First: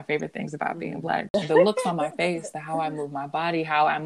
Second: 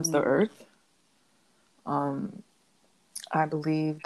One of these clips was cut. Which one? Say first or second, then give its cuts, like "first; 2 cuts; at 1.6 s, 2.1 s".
first; 1 cut; at 1.3 s